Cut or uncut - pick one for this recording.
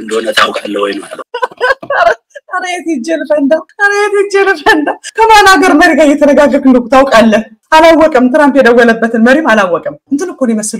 uncut